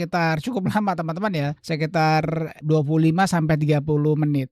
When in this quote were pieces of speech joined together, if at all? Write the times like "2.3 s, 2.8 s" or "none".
1.6 s, 2.6 s